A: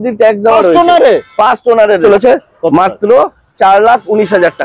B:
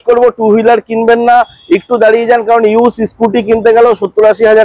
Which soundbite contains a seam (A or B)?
A